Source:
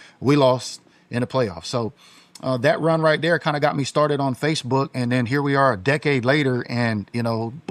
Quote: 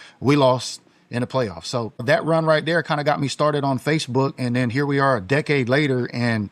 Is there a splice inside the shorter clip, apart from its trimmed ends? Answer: yes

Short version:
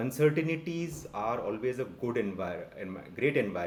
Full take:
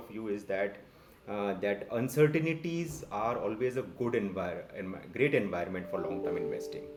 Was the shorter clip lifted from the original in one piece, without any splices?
yes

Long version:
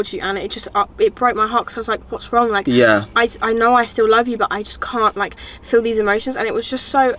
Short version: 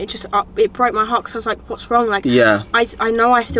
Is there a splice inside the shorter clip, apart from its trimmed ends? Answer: no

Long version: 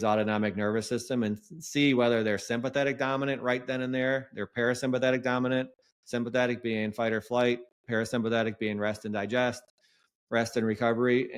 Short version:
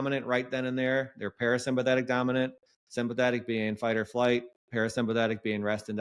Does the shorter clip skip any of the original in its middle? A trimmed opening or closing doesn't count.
no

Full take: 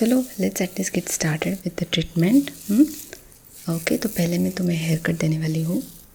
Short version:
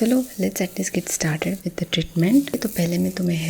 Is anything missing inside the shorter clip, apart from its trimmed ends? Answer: yes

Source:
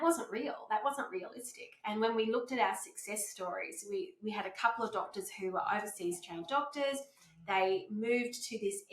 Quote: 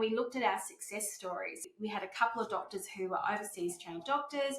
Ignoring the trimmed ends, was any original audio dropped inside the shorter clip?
yes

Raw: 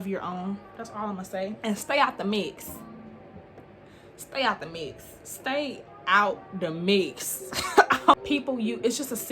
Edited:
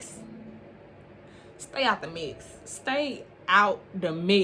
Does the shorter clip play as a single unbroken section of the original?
yes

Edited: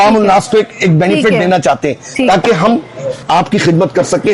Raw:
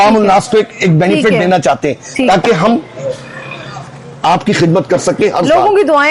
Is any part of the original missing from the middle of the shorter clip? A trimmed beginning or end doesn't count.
yes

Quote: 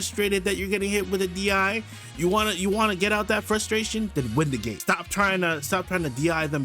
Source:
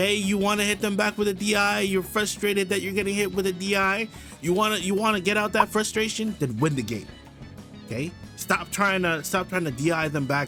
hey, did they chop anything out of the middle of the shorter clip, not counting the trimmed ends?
yes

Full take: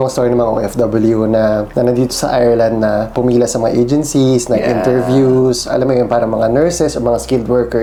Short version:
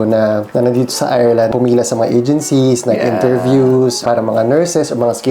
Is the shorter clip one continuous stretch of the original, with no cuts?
no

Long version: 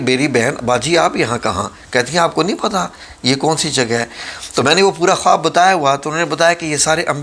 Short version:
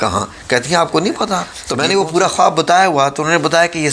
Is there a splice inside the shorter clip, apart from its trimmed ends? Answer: yes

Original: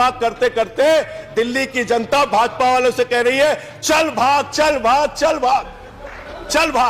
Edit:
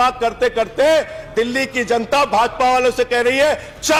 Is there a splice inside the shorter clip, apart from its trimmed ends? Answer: no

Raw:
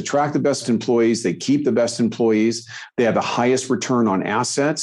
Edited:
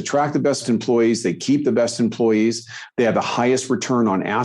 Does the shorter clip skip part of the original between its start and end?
no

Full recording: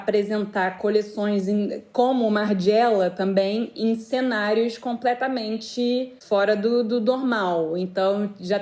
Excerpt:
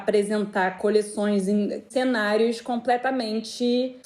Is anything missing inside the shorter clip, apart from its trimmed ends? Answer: yes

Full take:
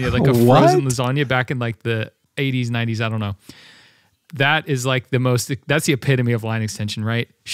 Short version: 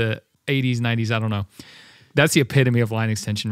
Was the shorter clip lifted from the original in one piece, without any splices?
no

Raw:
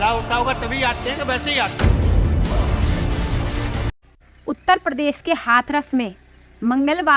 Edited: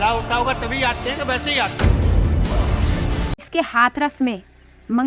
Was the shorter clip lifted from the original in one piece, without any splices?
no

